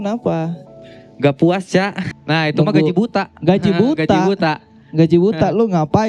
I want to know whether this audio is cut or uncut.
cut